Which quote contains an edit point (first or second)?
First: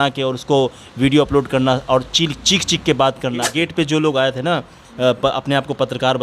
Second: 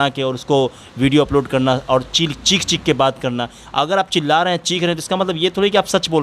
first